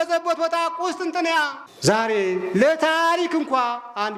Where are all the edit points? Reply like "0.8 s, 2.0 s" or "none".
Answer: 1.6 s